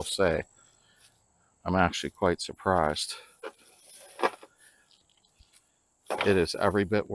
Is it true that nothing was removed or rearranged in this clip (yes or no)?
yes